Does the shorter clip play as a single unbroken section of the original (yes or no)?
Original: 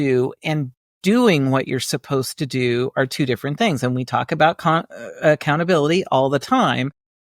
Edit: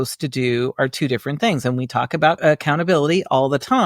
no